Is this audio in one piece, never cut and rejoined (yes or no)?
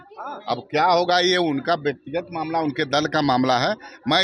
yes